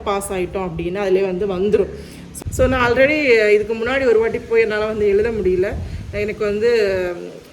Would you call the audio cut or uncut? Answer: cut